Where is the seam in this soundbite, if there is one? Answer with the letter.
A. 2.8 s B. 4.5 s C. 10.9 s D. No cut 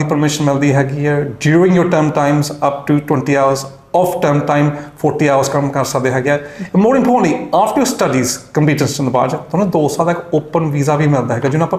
D